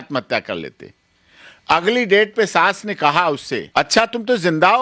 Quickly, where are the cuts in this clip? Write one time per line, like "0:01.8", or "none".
0:03.7

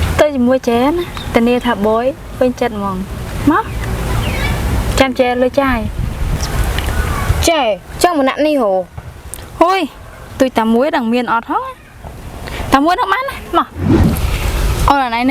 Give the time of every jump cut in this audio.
0:13.8

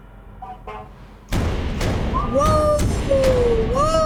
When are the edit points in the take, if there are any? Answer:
none

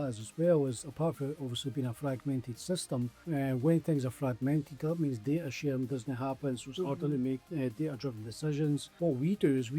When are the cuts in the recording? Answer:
0:03.2
0:07.4
0:08.9

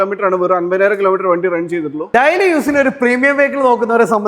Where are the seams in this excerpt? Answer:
0:02.0

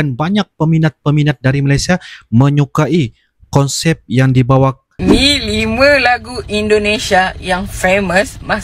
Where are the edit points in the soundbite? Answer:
0:04.9

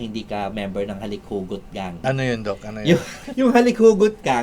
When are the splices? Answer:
0:02.0
0:03.2

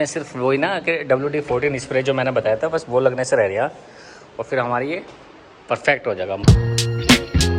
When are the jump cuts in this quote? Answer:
0:06.4

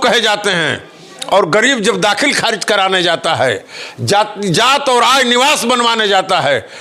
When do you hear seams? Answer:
none

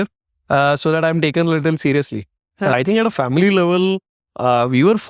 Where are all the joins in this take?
0:02.7

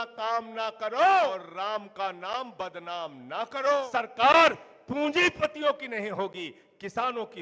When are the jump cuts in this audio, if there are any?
0:01.4
0:03.9

